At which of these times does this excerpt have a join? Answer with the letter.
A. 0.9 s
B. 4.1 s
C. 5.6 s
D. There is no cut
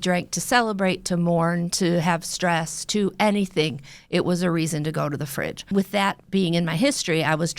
C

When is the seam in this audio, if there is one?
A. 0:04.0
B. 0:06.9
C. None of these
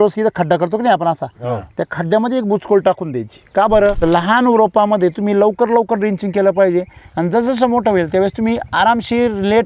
A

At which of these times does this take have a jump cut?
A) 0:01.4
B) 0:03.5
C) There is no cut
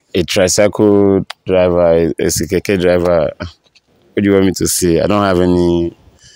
C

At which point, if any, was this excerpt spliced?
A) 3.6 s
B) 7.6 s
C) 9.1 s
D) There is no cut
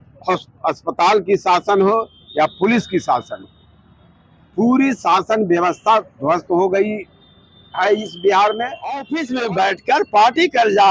C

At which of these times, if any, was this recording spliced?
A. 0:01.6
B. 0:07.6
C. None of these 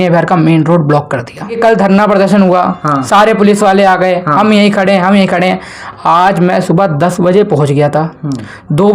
A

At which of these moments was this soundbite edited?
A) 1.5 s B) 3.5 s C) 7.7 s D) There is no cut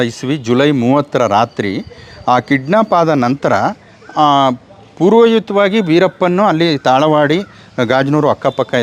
D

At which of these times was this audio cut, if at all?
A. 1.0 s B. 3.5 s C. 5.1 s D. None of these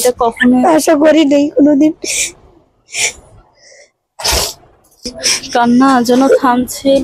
C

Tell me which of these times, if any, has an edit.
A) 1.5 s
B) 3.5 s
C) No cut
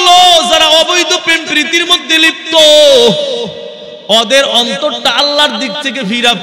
C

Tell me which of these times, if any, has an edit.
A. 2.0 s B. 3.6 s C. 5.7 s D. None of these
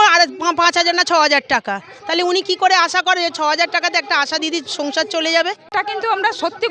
C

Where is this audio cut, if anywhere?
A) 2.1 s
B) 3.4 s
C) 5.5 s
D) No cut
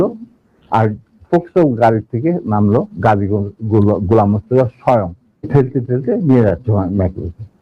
C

